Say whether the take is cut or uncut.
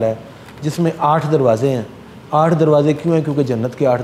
uncut